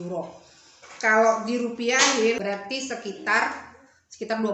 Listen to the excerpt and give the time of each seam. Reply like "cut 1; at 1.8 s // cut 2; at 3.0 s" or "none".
cut 1; at 2.4 s